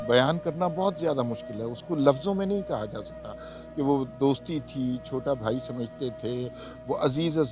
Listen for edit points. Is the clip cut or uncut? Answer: uncut